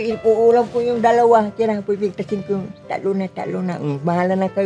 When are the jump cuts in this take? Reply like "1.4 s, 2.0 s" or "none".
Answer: none